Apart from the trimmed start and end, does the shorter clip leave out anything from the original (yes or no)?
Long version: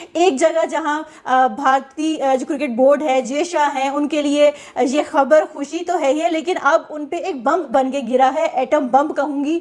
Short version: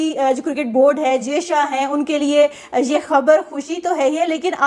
no